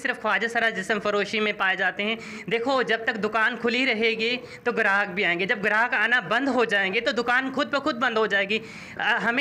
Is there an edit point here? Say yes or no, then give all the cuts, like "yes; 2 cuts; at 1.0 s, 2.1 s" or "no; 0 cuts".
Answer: no; 0 cuts